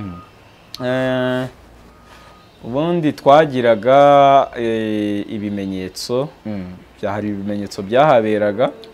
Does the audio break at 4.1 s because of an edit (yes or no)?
no